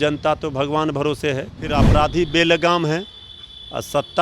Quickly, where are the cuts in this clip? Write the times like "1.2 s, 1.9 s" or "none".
1.9 s